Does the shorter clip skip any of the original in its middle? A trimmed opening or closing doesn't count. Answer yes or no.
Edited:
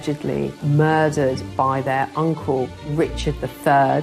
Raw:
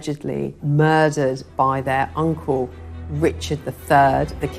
yes